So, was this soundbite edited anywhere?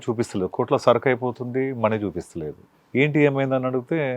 yes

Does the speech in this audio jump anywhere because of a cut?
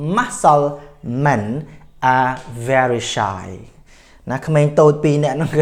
no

